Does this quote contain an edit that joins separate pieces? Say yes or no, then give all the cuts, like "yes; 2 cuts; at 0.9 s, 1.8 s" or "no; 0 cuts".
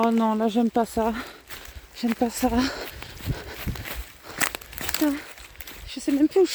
no; 0 cuts